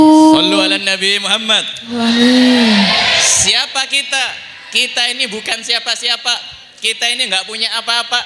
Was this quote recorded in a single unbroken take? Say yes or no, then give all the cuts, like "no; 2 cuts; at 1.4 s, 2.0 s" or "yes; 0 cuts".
no; 1 cut; at 2.0 s